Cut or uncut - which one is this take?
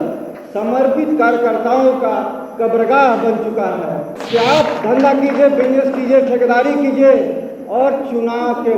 cut